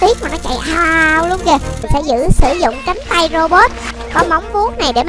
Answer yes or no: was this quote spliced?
yes